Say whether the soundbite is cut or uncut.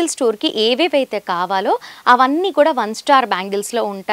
uncut